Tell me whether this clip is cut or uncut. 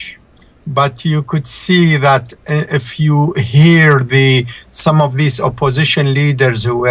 uncut